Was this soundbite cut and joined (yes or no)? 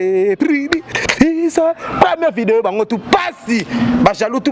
no